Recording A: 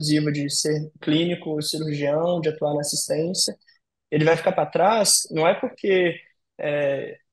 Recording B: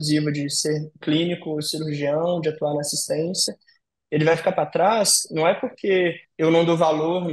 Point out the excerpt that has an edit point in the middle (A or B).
B